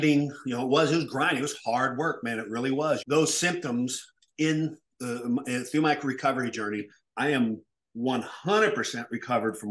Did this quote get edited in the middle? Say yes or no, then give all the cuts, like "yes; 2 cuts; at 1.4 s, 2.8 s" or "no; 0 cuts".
yes; 1 cut; at 3.0 s